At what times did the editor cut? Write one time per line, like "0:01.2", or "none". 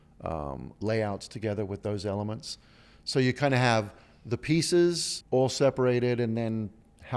0:05.1